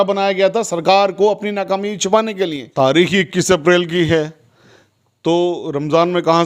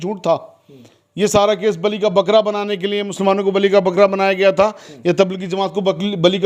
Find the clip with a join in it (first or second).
first